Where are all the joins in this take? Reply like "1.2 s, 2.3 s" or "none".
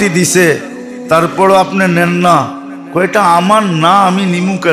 none